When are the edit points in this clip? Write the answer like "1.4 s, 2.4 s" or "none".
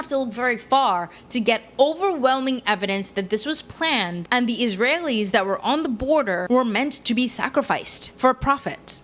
none